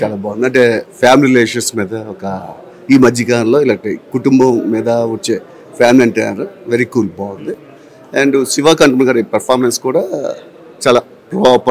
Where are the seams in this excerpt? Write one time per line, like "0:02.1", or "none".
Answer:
none